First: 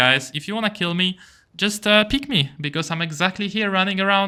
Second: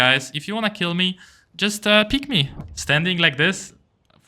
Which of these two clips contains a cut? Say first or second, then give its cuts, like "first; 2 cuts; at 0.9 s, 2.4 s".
second; 1 cut; at 2.6 s